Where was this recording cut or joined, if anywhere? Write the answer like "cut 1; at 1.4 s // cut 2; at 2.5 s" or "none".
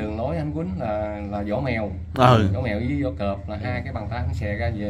none